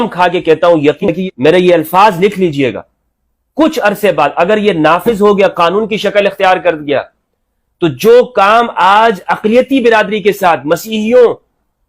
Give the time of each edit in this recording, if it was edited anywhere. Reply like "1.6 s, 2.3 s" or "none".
1.0 s